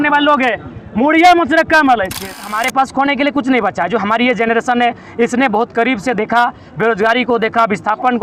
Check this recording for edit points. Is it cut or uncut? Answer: cut